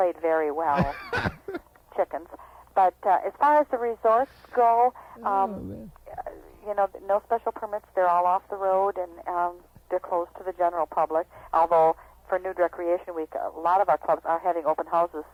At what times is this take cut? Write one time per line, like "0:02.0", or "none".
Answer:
none